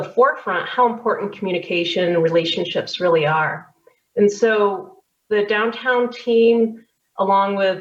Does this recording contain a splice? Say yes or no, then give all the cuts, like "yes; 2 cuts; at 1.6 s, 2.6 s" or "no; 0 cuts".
no; 0 cuts